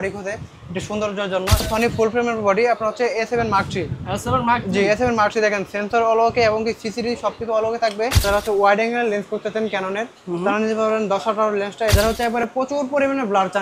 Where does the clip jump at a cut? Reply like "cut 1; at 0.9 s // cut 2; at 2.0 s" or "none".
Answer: cut 1; at 1.7 s // cut 2; at 8.2 s // cut 3; at 11.9 s